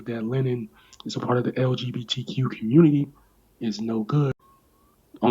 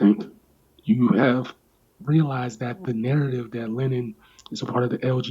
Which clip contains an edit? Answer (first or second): first